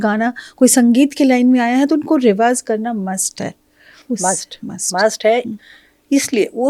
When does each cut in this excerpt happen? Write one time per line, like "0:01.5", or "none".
none